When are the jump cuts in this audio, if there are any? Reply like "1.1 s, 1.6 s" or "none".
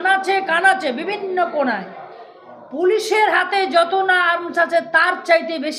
none